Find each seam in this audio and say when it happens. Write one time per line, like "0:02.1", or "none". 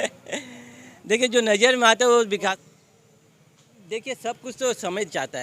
0:02.5